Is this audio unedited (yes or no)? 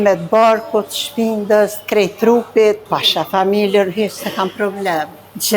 no